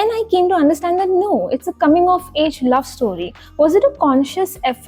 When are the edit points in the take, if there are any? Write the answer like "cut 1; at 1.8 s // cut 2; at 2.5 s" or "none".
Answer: none